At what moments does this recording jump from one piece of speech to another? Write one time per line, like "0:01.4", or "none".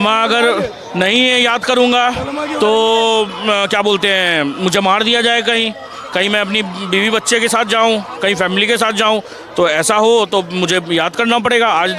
none